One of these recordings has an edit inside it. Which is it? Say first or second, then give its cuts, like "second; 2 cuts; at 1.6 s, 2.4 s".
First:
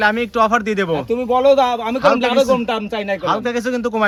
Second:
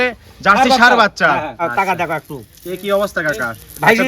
second; 1 cut; at 1.6 s